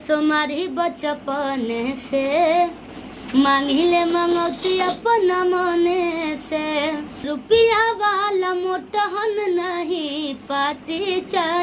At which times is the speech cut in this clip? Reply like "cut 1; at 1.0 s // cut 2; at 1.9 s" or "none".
cut 1; at 7.1 s